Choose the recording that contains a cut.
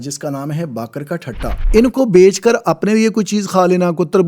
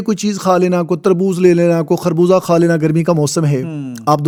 first; 1 cut; at 1.7 s

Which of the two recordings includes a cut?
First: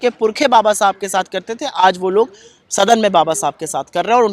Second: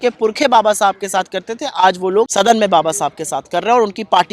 second; 1 cut; at 2.3 s

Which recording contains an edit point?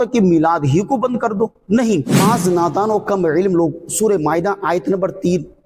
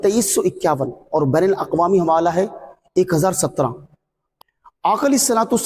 first; 1 cut; at 2.1 s

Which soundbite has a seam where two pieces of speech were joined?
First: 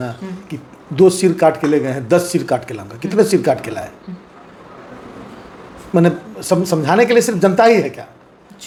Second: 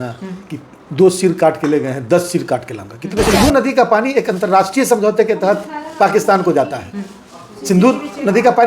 second; 1 cut; at 3.3 s

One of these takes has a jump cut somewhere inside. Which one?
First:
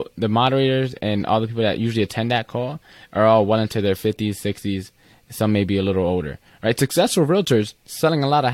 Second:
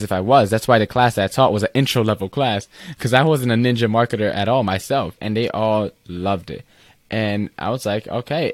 second; 1 cut; at 5.2 s

